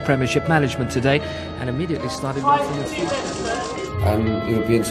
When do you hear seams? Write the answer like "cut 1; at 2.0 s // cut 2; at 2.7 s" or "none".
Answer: cut 1; at 2.0 s